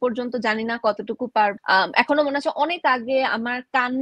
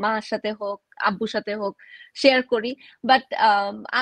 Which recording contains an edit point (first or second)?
first